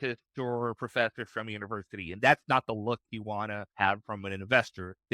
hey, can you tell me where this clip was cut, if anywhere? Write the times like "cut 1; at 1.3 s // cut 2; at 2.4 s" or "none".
cut 1; at 3.6 s